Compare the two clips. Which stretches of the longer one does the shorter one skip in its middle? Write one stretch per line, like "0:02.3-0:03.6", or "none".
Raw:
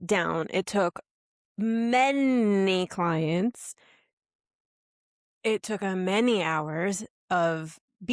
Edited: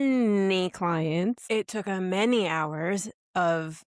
0:03.6-0:05.4